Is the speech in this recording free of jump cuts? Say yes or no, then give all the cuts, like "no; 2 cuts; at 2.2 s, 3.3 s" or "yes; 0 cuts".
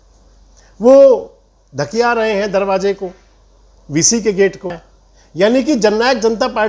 no; 1 cut; at 4.7 s